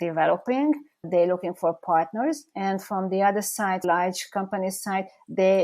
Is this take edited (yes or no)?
yes